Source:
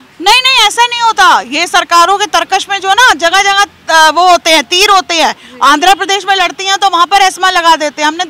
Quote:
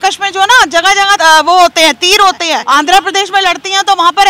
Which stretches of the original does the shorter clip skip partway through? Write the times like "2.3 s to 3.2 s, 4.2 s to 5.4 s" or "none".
3.7 s to 3.9 s, 5.3 s to 5.5 s